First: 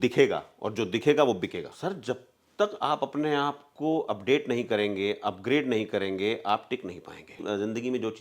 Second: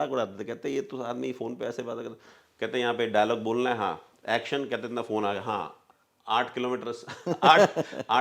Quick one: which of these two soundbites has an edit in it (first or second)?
first